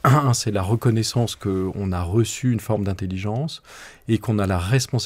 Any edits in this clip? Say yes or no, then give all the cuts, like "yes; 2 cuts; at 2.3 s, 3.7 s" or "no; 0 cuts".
no; 0 cuts